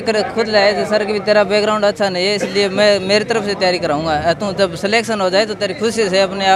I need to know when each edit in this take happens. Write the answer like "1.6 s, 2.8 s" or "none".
none